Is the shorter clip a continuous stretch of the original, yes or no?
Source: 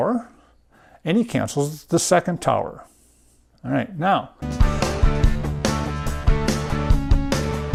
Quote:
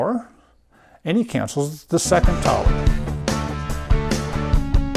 no